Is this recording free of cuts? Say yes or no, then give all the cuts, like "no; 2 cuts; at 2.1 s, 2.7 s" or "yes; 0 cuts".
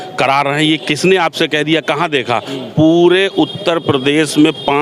yes; 0 cuts